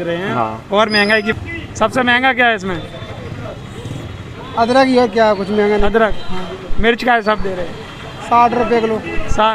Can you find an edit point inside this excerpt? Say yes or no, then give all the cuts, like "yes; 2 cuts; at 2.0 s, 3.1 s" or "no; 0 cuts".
yes; 1 cut; at 1.3 s